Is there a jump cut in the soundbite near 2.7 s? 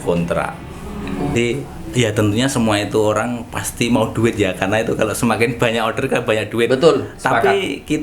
no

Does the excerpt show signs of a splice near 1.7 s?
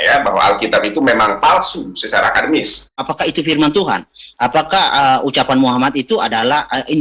no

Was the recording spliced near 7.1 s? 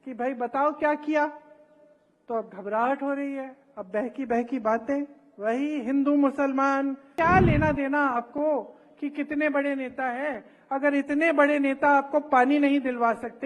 yes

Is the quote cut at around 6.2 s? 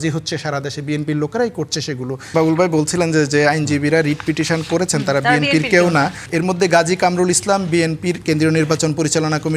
yes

